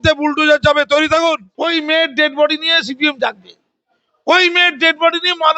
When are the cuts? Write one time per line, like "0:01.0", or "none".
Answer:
0:01.5

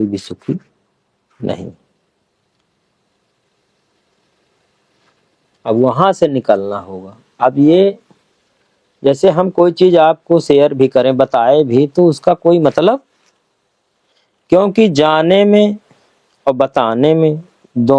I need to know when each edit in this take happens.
none

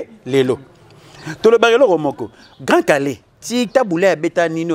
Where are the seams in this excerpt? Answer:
none

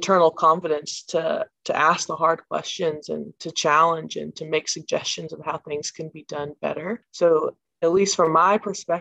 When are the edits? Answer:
0:01.5
0:07.1

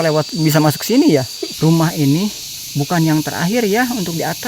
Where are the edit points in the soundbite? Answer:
0:01.4

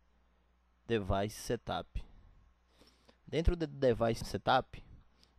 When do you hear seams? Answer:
0:04.2

